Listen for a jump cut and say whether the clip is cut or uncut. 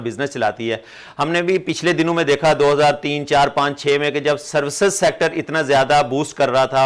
uncut